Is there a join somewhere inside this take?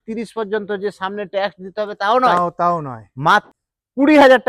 yes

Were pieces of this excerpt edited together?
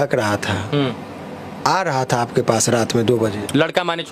no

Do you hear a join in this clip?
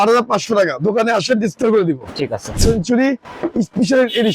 yes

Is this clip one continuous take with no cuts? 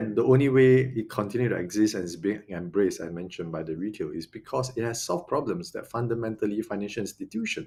yes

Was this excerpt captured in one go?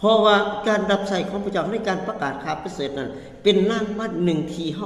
no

